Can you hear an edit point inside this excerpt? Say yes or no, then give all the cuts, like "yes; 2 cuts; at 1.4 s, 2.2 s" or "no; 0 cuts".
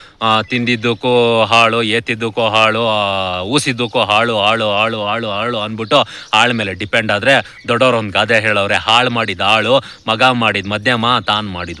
no; 0 cuts